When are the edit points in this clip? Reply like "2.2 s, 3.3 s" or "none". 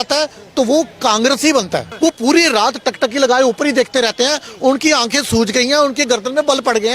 1.9 s